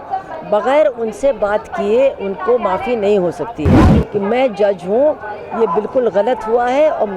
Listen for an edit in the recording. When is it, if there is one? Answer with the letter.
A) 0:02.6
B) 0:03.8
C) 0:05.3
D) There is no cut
B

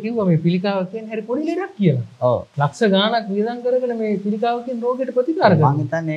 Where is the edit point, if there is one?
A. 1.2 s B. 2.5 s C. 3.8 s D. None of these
B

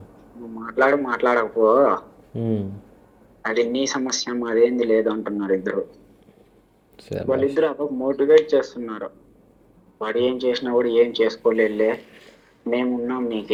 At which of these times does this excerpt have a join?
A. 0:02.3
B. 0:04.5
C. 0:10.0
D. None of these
D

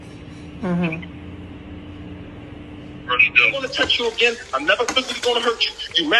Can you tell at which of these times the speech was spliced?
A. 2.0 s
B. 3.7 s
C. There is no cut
B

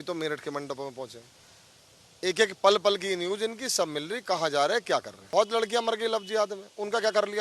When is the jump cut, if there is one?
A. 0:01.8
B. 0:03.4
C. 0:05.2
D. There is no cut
C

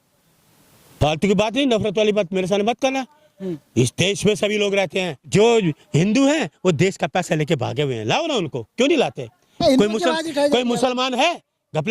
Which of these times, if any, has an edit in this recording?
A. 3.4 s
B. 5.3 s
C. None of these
B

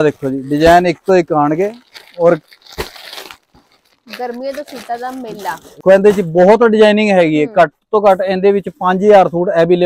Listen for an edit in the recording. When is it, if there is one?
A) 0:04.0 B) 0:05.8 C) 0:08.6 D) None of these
B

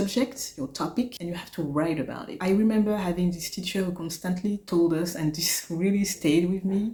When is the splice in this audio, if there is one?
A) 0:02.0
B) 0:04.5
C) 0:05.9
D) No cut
D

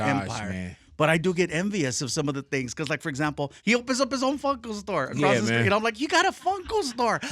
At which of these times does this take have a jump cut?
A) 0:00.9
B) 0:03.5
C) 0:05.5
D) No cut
B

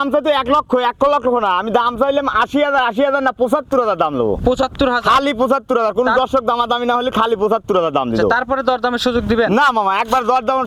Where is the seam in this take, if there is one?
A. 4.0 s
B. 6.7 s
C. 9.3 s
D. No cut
D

